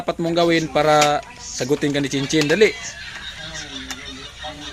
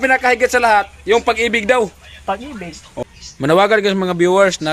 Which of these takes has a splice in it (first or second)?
second